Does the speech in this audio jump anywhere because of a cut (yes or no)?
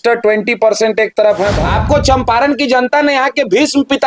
yes